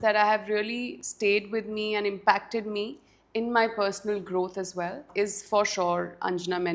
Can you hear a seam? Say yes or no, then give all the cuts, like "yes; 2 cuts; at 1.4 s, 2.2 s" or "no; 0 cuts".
yes; 2 cuts; at 0.9 s, 5.0 s